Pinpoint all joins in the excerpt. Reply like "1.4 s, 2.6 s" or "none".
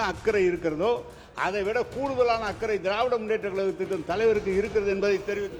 none